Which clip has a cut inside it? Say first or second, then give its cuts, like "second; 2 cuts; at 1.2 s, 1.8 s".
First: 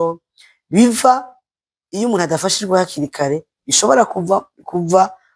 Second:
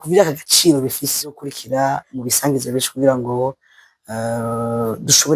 second; 1 cut; at 1.5 s